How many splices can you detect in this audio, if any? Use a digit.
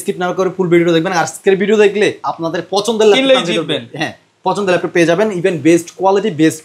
0